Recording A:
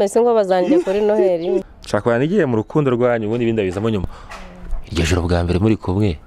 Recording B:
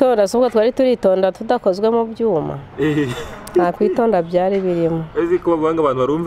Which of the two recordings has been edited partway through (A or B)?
A